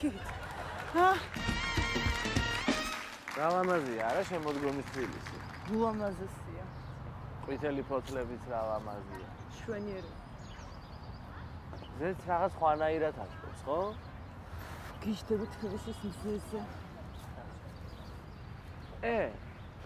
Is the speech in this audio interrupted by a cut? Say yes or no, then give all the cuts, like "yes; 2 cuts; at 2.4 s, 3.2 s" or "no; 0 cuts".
yes; 1 cut; at 15.4 s